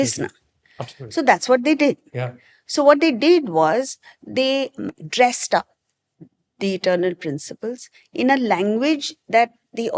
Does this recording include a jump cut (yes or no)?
yes